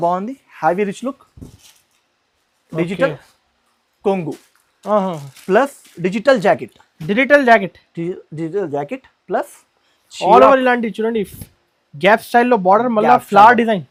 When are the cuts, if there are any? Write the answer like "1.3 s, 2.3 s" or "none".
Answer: none